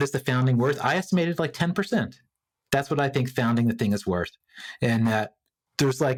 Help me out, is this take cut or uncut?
uncut